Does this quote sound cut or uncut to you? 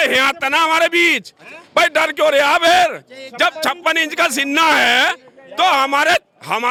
uncut